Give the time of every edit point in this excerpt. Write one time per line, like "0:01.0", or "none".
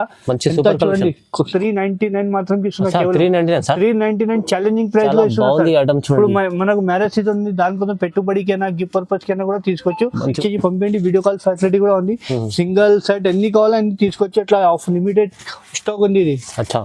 0:01.5
0:10.3